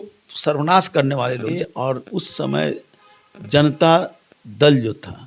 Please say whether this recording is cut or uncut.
cut